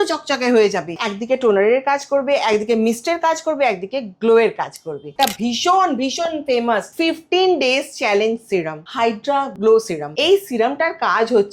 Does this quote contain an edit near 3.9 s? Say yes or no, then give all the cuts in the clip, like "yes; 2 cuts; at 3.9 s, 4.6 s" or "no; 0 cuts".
no; 5 cuts; at 1.1 s, 5.1 s, 6.9 s, 9.2 s, 10.0 s